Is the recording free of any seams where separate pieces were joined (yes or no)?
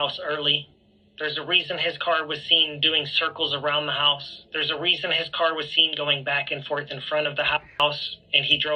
yes